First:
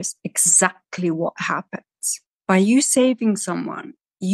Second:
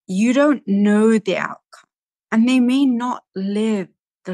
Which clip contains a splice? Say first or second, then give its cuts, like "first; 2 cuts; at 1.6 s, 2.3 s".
first; 1 cut; at 2.3 s